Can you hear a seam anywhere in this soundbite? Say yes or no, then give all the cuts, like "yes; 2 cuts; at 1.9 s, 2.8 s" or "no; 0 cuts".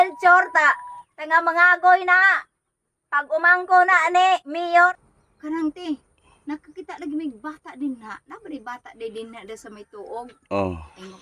yes; 1 cut; at 4.9 s